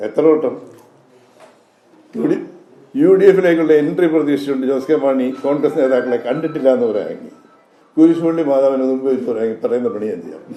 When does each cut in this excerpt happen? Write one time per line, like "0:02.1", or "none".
none